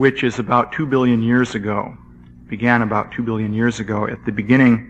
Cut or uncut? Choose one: uncut